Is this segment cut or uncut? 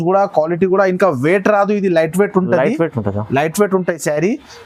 uncut